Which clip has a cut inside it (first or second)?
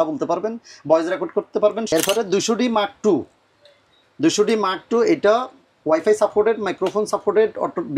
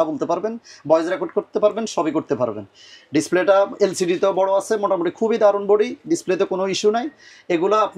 first